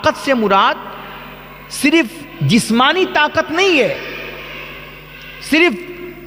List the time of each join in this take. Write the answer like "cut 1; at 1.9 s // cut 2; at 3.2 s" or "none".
none